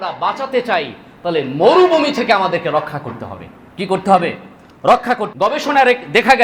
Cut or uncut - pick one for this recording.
cut